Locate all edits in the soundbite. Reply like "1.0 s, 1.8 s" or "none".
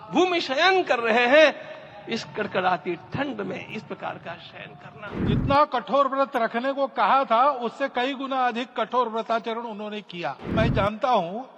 5.2 s, 10.5 s